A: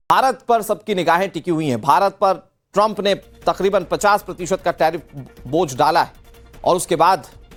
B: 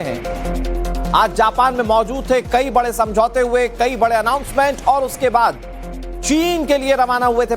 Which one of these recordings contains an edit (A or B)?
B